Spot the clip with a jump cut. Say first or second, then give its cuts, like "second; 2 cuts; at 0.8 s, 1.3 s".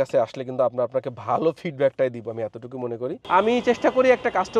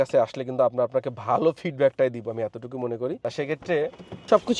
first; 1 cut; at 3.2 s